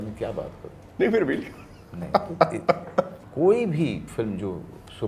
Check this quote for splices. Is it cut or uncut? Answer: cut